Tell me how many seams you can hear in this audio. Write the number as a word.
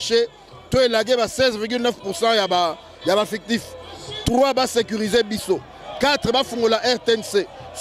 zero